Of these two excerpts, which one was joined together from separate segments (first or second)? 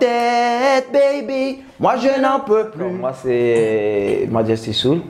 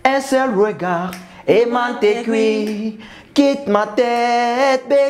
first